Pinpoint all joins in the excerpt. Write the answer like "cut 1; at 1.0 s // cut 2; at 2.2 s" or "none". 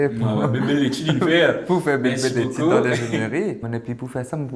none